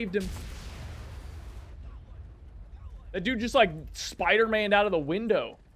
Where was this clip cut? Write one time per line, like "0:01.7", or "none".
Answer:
none